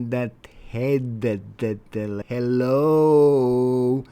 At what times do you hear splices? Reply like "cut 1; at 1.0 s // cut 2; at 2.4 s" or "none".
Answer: cut 1; at 2.2 s